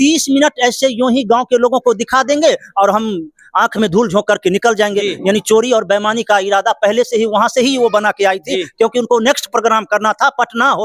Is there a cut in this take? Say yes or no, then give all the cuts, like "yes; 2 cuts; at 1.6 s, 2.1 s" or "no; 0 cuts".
no; 0 cuts